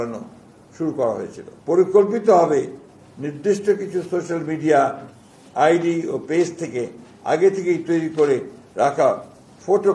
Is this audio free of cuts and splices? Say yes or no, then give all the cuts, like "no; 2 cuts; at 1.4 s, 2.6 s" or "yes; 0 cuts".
no; 1 cut; at 1.5 s